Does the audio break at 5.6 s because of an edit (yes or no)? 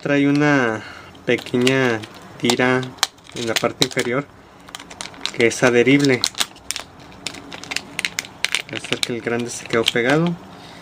yes